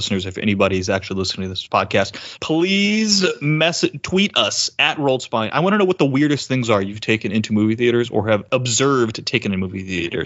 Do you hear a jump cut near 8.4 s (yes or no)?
yes